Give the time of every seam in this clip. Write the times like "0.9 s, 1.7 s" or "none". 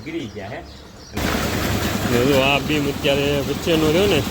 1.2 s